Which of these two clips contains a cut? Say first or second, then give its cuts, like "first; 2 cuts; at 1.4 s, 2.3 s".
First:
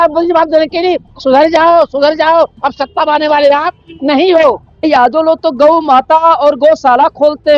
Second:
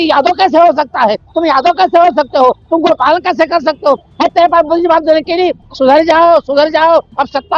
first; 1 cut; at 4.9 s